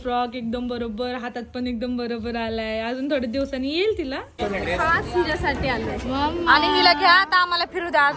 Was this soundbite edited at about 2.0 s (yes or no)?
no